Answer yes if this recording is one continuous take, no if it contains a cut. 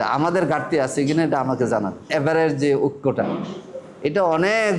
no